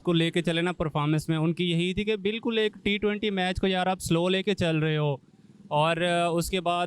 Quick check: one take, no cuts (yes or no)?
yes